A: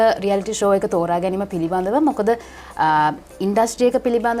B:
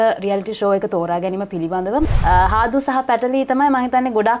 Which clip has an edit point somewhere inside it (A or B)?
B